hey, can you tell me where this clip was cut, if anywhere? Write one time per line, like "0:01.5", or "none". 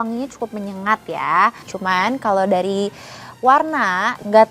0:01.6